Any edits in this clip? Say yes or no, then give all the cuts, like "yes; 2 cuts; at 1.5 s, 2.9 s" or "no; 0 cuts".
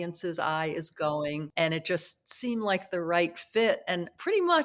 yes; 1 cut; at 1.5 s